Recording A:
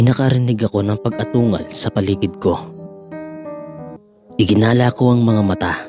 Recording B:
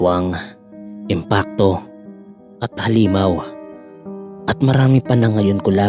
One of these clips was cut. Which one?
A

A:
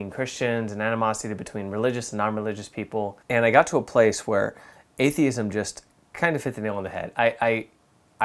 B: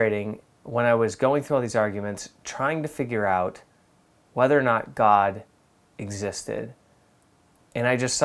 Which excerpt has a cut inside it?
A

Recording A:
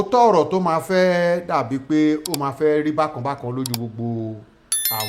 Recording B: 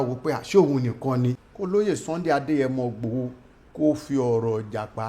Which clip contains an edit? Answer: B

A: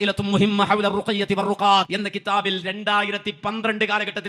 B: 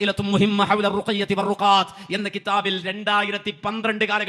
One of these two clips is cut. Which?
A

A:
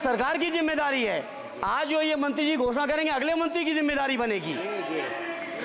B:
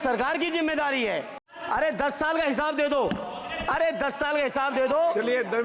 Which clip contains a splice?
B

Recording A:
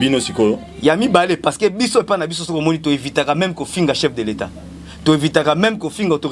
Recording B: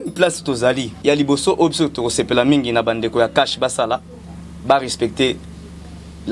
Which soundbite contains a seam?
B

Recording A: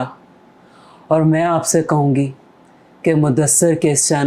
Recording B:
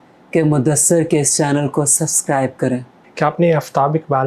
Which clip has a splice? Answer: B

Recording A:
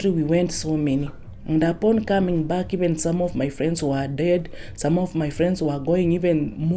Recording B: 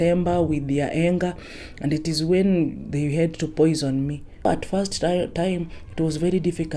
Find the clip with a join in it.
B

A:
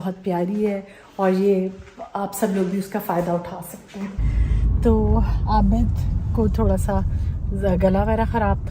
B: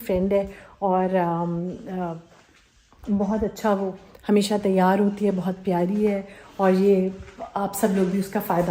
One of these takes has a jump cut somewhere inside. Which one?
A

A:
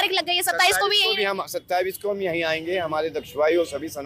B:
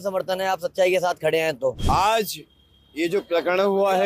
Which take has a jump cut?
B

